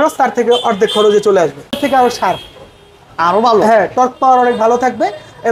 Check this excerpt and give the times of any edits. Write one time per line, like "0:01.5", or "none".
0:01.8